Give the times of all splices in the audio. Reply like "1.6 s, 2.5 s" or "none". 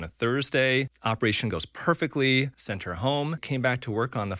0.9 s, 2.6 s, 3.4 s